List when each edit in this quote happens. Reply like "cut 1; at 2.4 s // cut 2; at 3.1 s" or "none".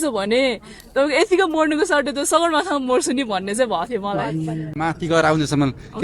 cut 1; at 4.7 s